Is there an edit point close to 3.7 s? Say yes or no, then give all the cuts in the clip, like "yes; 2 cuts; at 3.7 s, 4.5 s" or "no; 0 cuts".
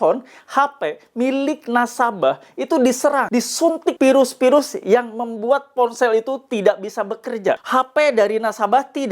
yes; 2 cuts; at 3.7 s, 7.6 s